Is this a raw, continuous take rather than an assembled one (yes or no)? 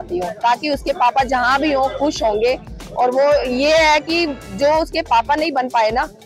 yes